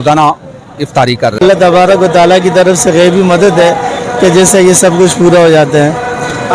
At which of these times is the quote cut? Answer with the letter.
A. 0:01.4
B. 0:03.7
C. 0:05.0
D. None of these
A